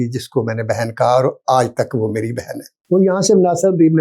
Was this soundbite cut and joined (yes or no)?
yes